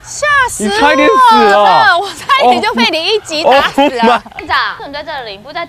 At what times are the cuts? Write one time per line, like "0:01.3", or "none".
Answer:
0:04.4